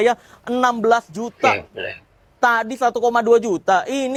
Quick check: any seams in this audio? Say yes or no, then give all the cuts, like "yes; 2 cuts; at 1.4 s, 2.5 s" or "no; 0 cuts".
no; 0 cuts